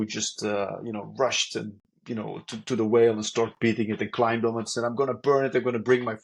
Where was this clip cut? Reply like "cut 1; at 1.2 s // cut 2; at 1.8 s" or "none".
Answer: none